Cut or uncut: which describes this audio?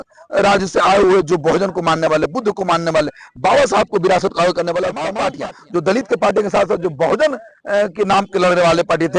cut